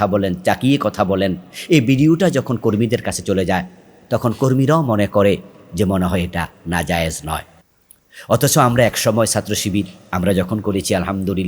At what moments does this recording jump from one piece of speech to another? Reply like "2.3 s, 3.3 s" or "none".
none

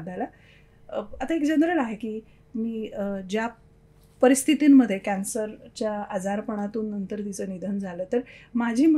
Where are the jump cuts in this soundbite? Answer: none

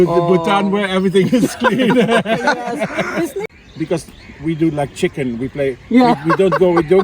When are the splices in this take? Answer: 3.4 s

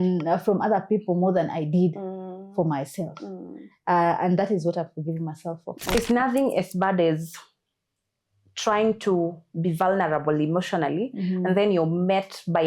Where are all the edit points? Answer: 5.9 s

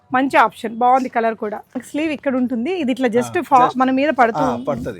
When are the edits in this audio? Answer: 1.8 s

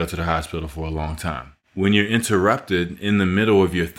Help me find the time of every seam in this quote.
1.5 s

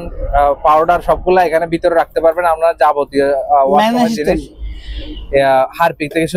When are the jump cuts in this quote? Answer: none

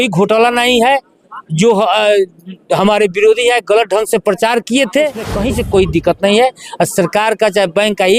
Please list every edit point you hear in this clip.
5.4 s

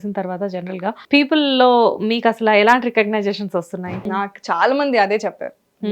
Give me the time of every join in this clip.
1.0 s, 4.0 s

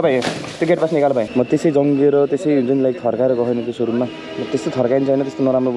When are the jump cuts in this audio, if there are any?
1.3 s

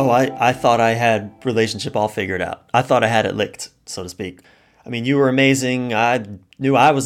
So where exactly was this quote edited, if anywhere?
none

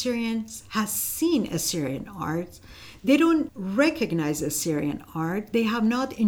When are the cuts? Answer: 3.6 s

